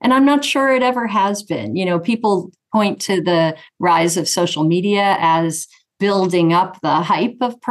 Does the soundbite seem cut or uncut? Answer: uncut